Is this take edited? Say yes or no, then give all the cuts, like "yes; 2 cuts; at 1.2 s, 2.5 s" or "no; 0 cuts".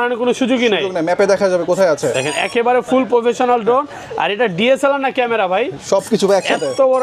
no; 0 cuts